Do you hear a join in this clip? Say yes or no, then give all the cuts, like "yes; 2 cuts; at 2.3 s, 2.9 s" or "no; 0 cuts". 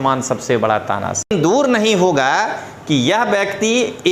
yes; 1 cut; at 1.3 s